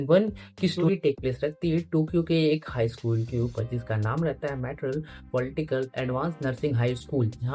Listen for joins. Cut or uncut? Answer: uncut